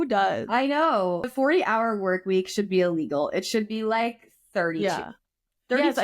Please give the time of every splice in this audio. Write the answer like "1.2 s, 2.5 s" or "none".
1.3 s